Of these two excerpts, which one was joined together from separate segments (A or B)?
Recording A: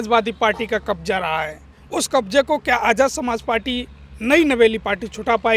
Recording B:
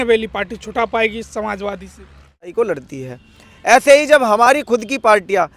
B